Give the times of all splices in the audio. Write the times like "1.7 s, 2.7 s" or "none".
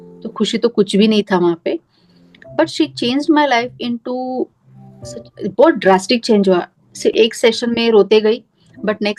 none